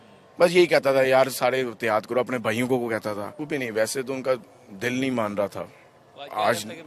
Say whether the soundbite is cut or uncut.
cut